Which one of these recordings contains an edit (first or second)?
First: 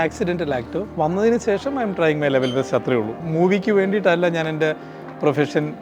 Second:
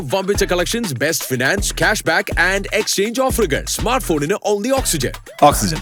first